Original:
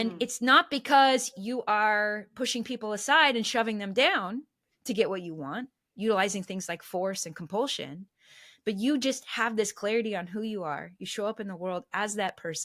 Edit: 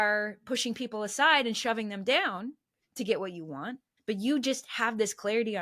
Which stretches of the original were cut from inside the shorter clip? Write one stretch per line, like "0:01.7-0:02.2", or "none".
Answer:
0:05.8-0:08.4